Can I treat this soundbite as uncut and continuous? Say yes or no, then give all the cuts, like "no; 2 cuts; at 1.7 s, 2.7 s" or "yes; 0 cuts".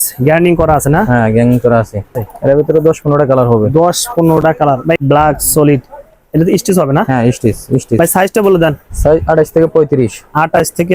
no; 3 cuts; at 2.2 s, 5.0 s, 8.0 s